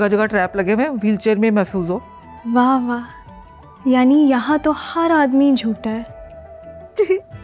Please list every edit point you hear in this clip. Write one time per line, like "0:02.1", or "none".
none